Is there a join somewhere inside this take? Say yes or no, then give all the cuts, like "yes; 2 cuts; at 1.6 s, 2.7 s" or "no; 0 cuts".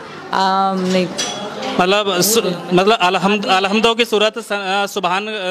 no; 0 cuts